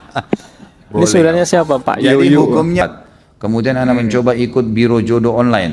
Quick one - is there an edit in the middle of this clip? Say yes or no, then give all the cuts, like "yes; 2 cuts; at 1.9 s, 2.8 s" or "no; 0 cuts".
yes; 1 cut; at 2.8 s